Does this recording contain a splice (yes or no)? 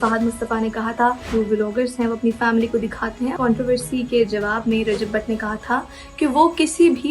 yes